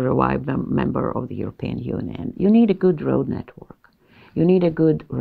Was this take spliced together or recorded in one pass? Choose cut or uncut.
cut